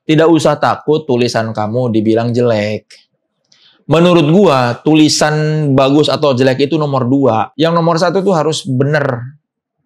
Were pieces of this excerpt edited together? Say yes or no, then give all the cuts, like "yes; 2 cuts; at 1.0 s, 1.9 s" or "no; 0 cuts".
yes; 1 cut; at 7.5 s